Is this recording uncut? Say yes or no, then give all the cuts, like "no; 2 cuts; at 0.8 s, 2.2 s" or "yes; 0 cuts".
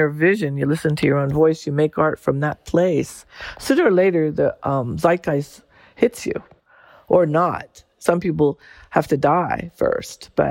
no; 1 cut; at 6.8 s